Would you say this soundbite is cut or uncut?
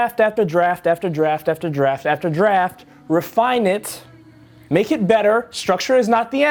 uncut